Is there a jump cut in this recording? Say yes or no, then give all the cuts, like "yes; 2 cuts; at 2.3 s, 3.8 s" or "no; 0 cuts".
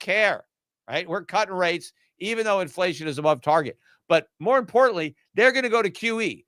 no; 0 cuts